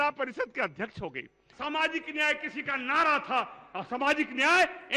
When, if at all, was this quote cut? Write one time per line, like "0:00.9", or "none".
0:01.4